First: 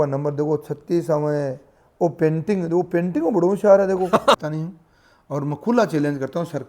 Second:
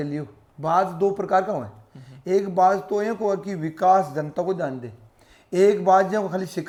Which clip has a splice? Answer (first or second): first